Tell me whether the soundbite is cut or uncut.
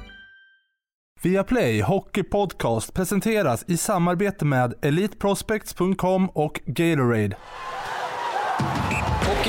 cut